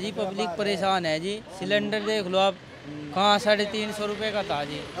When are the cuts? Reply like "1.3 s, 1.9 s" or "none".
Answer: none